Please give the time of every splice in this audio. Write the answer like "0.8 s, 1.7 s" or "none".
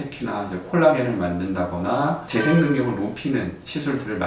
2.2 s